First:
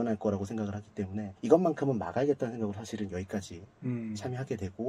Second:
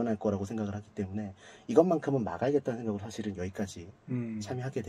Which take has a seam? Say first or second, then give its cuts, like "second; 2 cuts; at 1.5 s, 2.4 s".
first; 1 cut; at 1.3 s